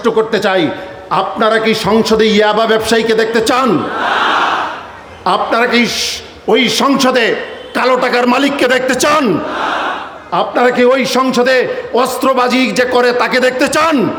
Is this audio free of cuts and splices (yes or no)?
yes